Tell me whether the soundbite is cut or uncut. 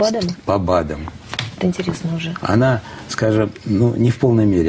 uncut